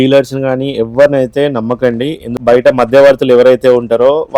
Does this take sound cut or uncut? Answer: cut